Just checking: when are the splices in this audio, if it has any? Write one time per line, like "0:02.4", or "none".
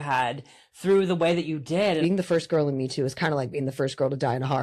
0:02.0

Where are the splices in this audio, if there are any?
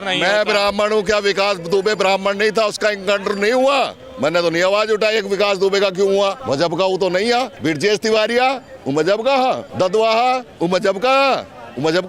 0:06.4
0:07.5
0:09.7

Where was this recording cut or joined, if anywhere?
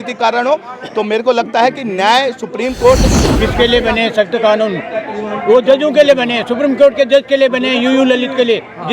0:03.2

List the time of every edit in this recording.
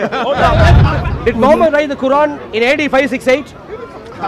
0:00.9

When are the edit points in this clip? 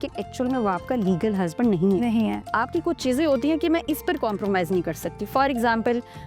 0:02.5

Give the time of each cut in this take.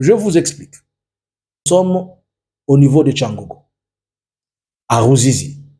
0:01.6

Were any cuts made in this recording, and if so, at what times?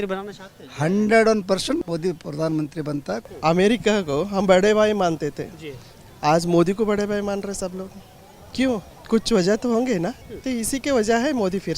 0:01.8
0:03.3
0:08.9
0:10.3

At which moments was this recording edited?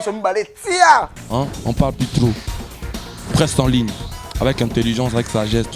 0:01.2

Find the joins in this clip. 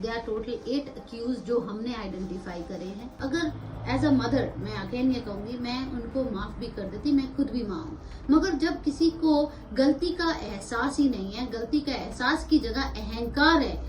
0:03.2

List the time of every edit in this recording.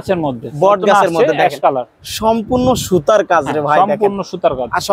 none

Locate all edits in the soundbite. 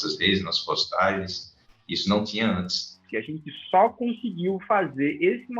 0:03.0

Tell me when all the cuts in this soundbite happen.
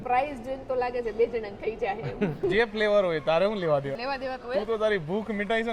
0:02.5
0:04.0

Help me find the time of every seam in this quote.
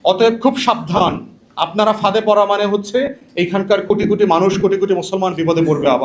none

